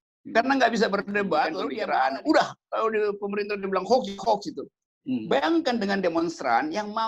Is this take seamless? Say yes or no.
no